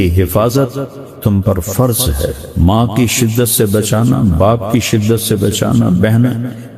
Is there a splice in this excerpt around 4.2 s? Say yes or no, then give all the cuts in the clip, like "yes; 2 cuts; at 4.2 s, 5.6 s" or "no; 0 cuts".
no; 1 cut; at 2.4 s